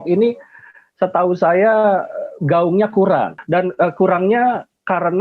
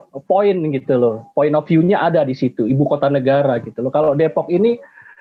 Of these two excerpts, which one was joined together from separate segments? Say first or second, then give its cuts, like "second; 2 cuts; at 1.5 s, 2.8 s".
first; 1 cut; at 3.4 s